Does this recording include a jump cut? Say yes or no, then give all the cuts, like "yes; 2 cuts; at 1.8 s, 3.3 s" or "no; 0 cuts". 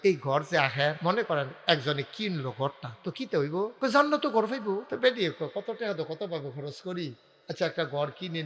yes; 3 cuts; at 1.0 s, 3.7 s, 4.9 s